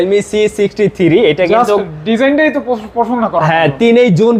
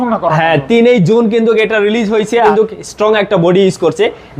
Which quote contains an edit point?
second; 1 cut; at 2.4 s

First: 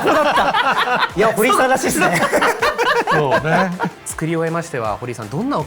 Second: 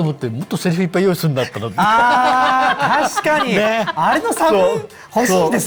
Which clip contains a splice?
first; 1 cut; at 3.9 s

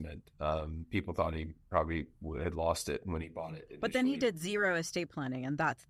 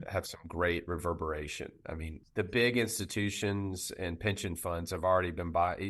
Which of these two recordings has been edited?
second; 1 cut; at 2.1 s

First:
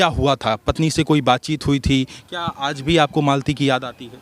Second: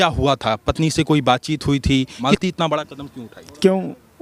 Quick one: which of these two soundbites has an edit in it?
first; 1 cut; at 2.1 s

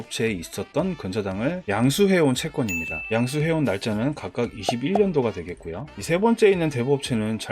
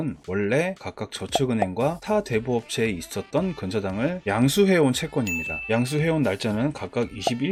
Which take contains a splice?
first; 1 cut; at 5.9 s

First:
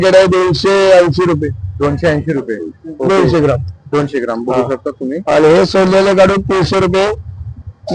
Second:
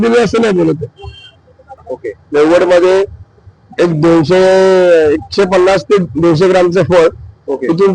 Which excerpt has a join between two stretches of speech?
second; 1 cut; at 1.9 s

